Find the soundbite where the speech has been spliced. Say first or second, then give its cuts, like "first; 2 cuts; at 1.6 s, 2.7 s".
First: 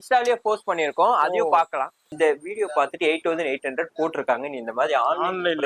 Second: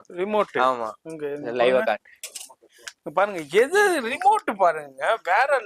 first; 1 cut; at 2.0 s